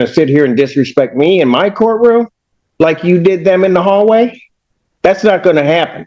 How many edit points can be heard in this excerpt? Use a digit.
0